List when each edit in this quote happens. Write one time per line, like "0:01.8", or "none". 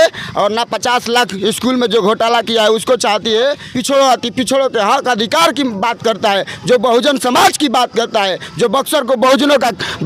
0:03.7